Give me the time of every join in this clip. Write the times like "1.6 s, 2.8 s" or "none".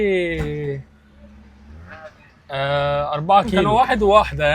3.6 s